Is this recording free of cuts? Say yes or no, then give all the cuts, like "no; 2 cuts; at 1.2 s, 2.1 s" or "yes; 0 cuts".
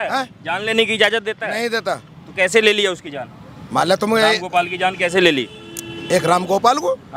yes; 0 cuts